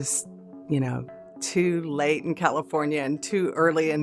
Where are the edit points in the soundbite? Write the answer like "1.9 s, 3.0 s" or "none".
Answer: 1.2 s

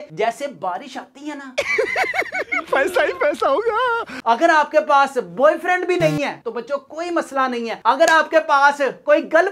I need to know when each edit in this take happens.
1.5 s, 4.1 s

